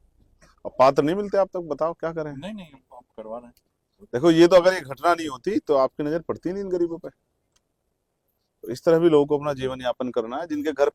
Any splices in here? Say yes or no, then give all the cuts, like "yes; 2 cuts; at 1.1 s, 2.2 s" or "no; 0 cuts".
no; 0 cuts